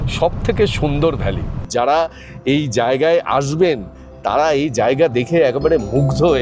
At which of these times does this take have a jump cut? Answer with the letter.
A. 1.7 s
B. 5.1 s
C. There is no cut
A